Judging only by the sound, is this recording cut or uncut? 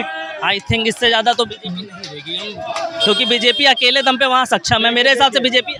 uncut